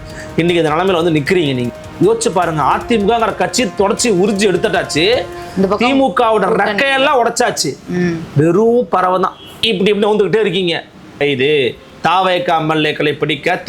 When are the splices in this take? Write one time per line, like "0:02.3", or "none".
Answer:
0:01.7
0:11.2